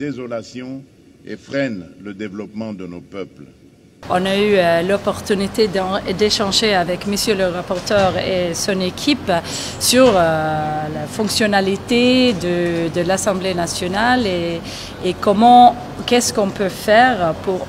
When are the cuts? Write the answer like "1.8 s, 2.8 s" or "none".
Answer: 4.0 s